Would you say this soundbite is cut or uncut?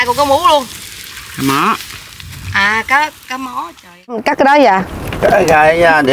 cut